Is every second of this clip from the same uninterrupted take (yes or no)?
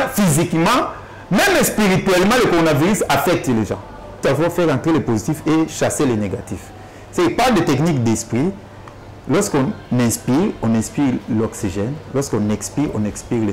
no